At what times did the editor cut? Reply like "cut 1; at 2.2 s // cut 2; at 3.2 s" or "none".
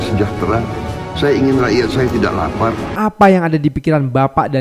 cut 1; at 2.9 s